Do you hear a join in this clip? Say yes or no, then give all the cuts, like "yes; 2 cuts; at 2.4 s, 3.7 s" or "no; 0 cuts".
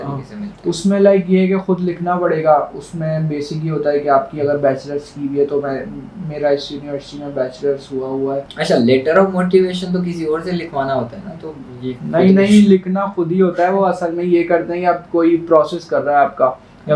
no; 0 cuts